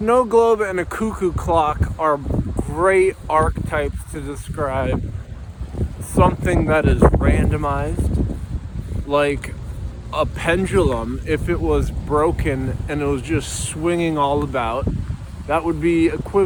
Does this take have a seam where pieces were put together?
no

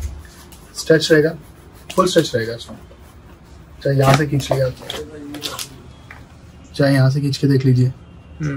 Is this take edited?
no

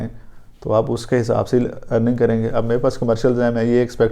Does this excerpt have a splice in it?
no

